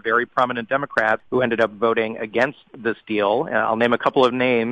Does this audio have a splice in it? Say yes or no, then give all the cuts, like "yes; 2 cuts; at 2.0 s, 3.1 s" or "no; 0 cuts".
yes; 1 cut; at 1.2 s